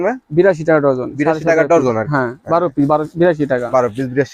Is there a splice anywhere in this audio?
no; 0 cuts

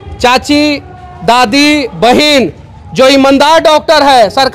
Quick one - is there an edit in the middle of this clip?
no; 0 cuts

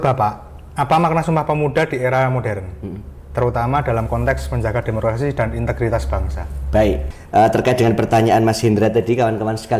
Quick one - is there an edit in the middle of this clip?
yes; 1 cut; at 7.1 s

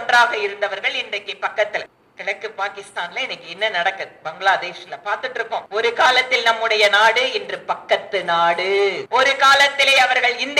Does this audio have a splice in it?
yes; 3 cuts; at 2.0 s, 5.7 s, 9.0 s

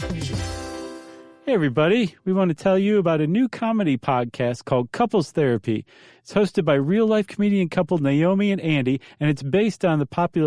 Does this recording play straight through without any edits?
no; 1 cut; at 1.2 s

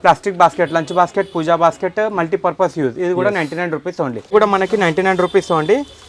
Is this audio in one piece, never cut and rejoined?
no; 1 cut; at 4.3 s

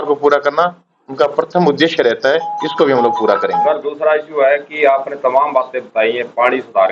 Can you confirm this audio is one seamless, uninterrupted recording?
yes; 0 cuts

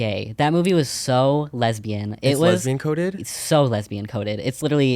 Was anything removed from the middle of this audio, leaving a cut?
no; 0 cuts

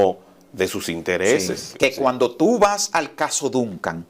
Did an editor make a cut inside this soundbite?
yes; 1 cut; at 1.7 s

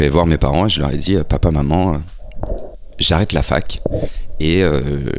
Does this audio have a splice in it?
no; 0 cuts

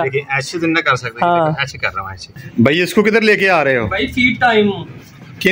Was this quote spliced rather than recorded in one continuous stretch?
yes; 1 cut; at 2.3 s

